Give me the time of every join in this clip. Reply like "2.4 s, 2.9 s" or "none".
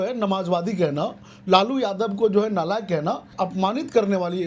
3.3 s